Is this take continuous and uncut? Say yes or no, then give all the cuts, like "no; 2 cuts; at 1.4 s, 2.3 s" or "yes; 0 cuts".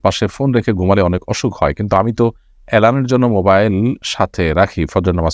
yes; 0 cuts